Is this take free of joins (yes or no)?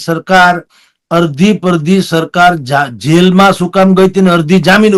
yes